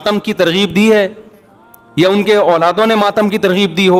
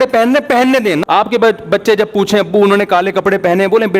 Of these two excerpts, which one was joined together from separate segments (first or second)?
second